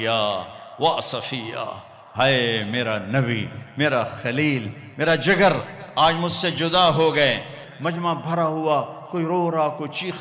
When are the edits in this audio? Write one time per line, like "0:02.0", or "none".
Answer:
0:07.6